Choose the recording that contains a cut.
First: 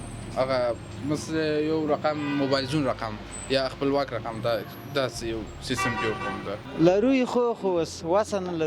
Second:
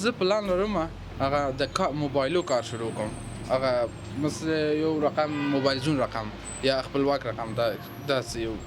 first; 1 cut; at 6.6 s

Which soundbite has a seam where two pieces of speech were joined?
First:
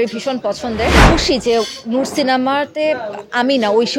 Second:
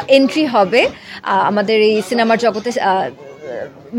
first; 1 cut; at 1.0 s

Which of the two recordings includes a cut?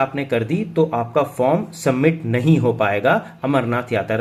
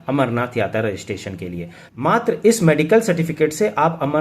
second; 1 cut; at 1.8 s

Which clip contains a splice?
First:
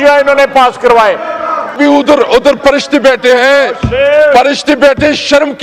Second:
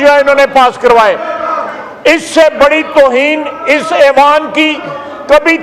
first; 1 cut; at 1.8 s

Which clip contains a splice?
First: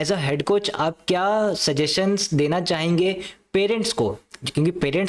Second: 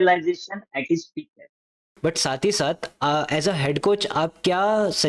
second; 1 cut; at 1.8 s

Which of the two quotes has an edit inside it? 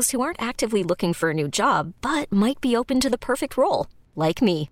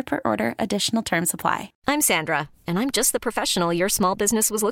second; 1 cut; at 1.7 s

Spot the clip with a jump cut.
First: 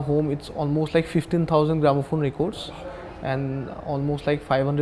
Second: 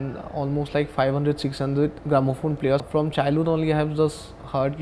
second; 1 cut; at 2.8 s

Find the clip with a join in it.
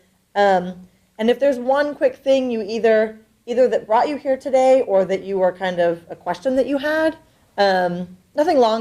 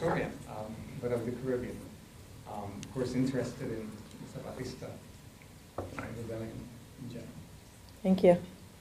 second; 1 cut; at 7.0 s

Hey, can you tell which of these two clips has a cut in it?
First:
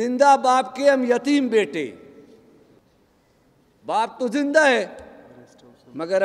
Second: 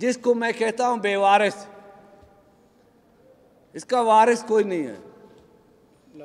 first; 1 cut; at 2.8 s

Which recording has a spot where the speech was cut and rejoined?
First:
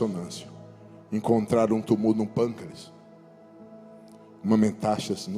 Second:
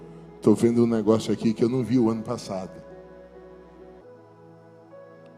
second; 1 cut; at 4.0 s

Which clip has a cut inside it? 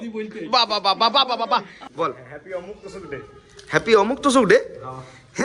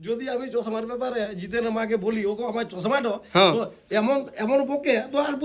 first; 1 cut; at 1.8 s

